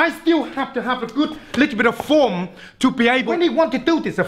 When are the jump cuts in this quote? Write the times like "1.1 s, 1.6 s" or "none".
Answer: 3.3 s